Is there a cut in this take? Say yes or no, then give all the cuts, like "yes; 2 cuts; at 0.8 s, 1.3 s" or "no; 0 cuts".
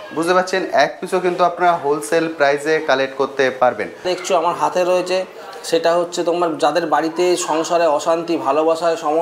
yes; 1 cut; at 4.1 s